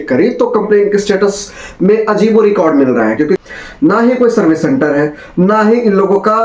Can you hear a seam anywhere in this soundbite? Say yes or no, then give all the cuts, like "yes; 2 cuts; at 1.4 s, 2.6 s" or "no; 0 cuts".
yes; 1 cut; at 3.4 s